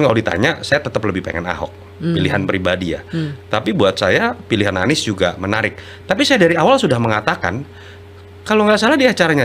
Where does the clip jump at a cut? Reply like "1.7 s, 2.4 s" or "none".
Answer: none